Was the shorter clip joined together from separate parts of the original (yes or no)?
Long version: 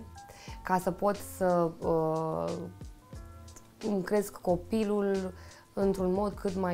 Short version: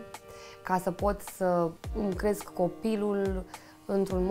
yes